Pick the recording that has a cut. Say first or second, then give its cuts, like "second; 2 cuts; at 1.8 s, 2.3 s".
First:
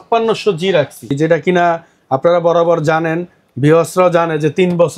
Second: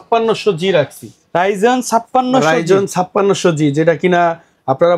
first; 1 cut; at 1.2 s